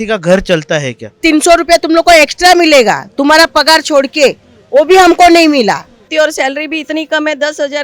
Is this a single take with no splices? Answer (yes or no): no